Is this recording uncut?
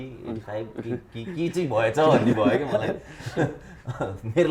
yes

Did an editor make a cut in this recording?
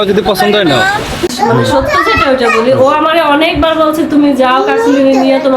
yes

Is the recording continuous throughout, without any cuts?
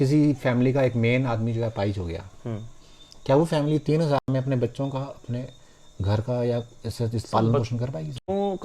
yes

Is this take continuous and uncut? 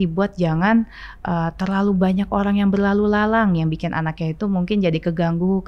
yes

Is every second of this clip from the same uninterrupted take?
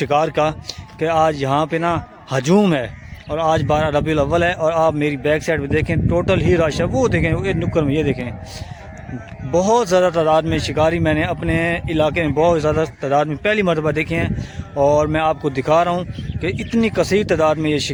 yes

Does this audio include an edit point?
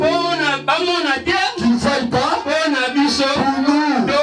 no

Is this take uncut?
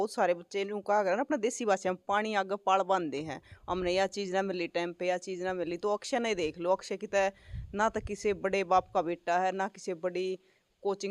yes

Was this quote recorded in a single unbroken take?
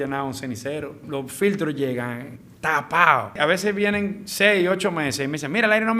no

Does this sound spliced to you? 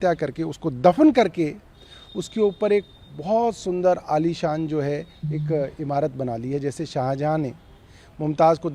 no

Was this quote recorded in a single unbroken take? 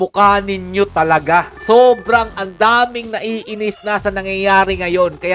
no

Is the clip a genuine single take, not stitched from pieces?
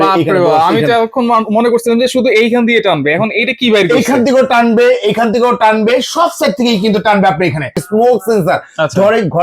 no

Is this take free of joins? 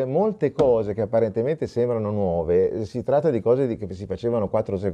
yes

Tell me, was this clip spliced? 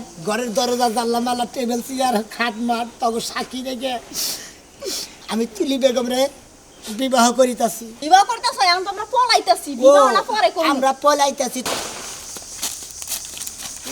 yes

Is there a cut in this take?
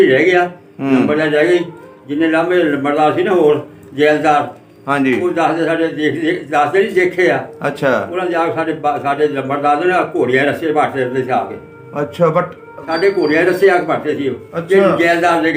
no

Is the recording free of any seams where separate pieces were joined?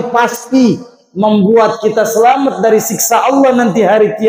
yes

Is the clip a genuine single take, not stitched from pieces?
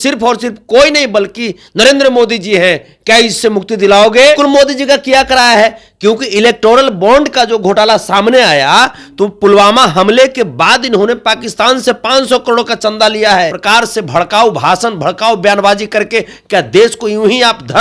no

